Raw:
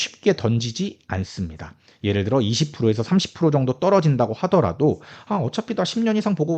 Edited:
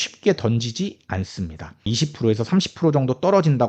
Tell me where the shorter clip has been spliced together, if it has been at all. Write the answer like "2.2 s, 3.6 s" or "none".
1.9 s